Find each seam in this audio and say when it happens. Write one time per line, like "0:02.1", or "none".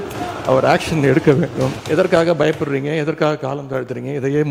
0:01.8